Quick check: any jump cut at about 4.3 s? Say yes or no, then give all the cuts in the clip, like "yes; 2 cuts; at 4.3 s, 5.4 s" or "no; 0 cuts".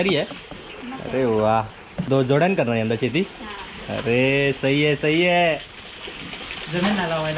no; 1 cut; at 2.1 s